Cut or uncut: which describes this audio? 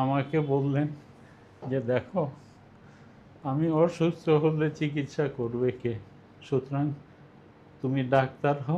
uncut